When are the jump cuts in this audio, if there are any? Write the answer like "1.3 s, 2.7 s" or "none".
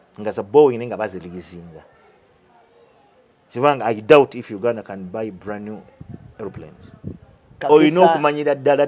7.5 s